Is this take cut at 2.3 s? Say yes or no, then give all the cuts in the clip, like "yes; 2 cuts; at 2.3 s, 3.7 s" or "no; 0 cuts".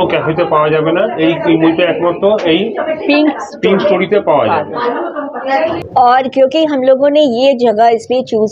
no; 1 cut; at 5.8 s